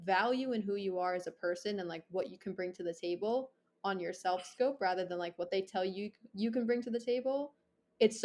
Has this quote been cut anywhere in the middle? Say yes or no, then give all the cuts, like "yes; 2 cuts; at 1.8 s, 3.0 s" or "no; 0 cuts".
no; 0 cuts